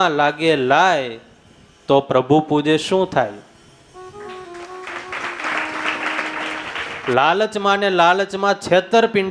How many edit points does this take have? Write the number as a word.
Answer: one